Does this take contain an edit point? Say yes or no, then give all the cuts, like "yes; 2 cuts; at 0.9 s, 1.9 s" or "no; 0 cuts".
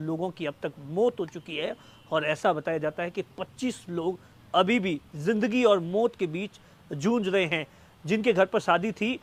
no; 0 cuts